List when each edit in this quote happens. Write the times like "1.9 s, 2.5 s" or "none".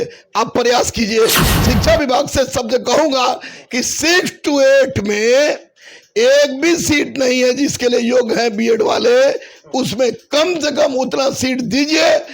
1.4 s